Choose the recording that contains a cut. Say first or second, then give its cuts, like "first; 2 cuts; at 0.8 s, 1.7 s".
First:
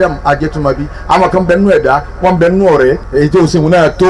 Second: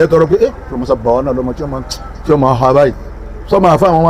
first; 1 cut; at 3.0 s